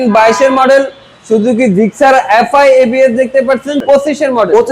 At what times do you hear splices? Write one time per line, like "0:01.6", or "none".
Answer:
0:03.8